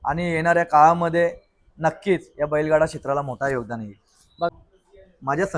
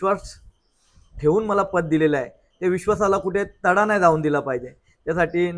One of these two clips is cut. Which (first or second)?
first